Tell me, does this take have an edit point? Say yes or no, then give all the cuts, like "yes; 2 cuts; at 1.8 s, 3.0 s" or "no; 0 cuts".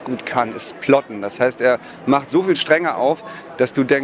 no; 0 cuts